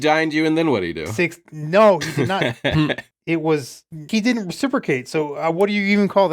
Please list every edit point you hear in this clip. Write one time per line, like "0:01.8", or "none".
0:01.0
0:02.5
0:04.0